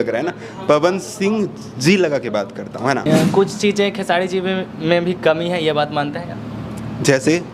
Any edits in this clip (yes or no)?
yes